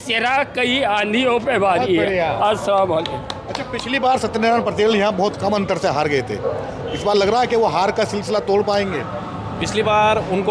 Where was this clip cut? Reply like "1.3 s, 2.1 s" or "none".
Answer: none